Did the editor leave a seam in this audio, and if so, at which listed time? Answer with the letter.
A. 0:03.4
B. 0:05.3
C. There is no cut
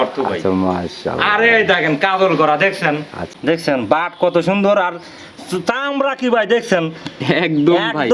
A